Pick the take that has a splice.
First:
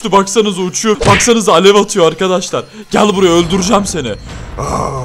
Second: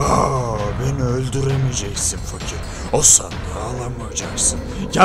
first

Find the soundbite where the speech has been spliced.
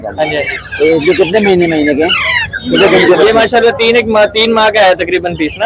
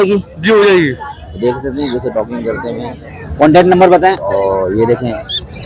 second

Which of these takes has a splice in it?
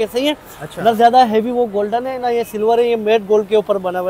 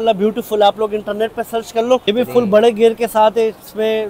second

